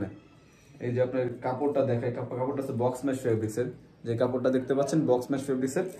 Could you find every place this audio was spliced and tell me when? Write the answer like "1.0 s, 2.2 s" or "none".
none